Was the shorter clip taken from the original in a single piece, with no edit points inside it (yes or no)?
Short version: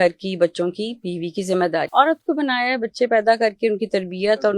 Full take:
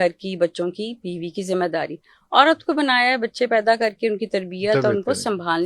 no